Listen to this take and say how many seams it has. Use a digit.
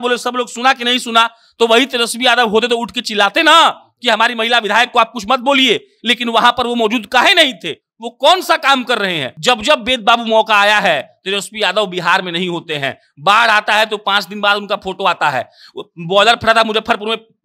1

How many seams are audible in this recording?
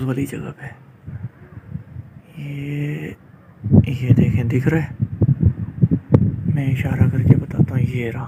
0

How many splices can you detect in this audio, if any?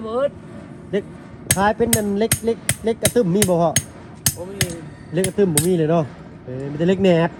0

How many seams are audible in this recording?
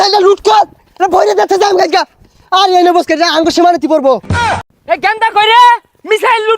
1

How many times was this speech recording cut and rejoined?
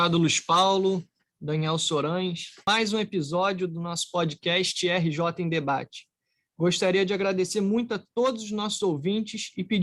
1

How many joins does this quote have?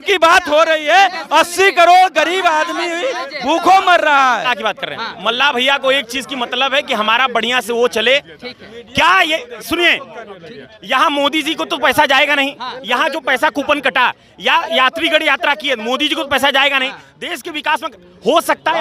0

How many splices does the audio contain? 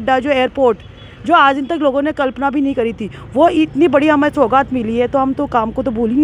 0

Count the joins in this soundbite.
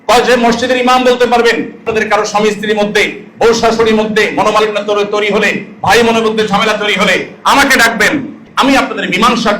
2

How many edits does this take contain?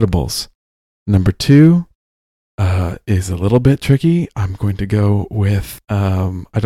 1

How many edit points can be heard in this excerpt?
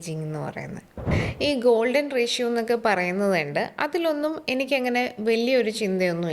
1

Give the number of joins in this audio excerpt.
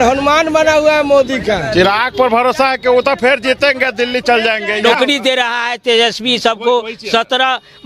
2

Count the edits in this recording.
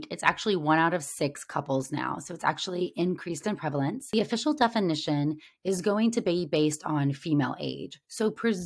1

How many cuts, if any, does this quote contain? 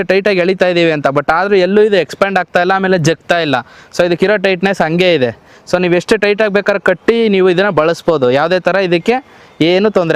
0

